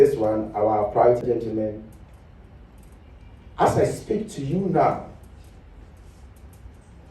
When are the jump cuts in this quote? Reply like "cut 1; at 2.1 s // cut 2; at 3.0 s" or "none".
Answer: cut 1; at 1.2 s